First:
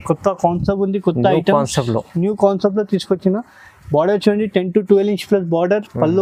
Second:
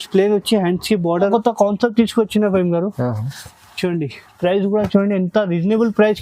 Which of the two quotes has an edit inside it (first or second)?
second